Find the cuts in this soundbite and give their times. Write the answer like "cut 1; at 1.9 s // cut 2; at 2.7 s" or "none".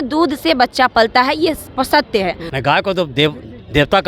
cut 1; at 2.4 s

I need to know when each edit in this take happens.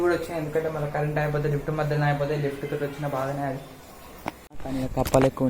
cut 1; at 4.5 s

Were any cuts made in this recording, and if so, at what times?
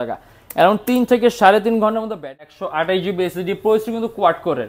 cut 1; at 2.4 s

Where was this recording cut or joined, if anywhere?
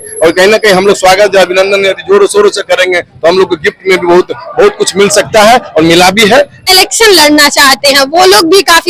cut 1; at 6.6 s

